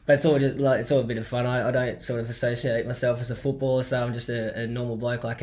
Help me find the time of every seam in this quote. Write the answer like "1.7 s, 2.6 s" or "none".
none